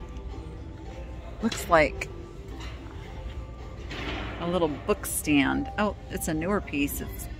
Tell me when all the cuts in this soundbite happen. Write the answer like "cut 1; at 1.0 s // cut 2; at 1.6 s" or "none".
none